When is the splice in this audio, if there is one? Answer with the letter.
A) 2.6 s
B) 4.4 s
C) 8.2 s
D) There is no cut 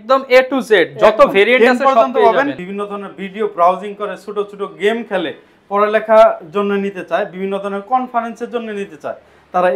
A